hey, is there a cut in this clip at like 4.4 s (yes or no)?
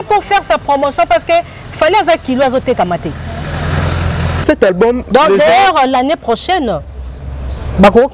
yes